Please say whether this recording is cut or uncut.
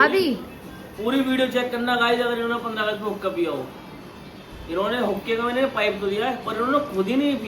uncut